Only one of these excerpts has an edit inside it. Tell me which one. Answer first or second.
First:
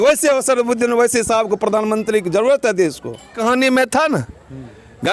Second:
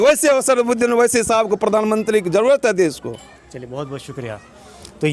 first